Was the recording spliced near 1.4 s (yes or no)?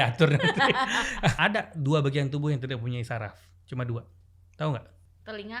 yes